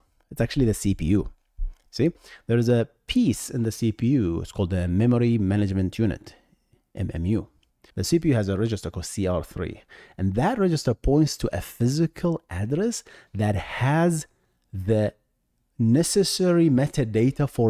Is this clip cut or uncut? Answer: uncut